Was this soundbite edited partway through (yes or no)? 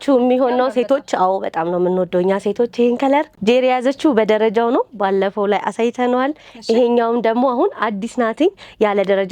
yes